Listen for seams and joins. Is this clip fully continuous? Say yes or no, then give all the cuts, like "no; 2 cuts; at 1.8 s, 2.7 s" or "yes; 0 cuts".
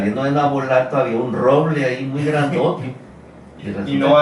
yes; 0 cuts